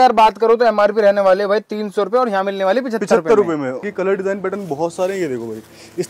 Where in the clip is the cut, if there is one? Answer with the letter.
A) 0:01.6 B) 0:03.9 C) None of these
B